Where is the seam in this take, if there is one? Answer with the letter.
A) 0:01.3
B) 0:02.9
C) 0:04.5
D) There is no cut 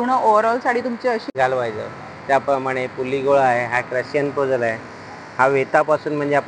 A